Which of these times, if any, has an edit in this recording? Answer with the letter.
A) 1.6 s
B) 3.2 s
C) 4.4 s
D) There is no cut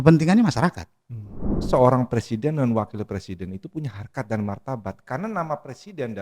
A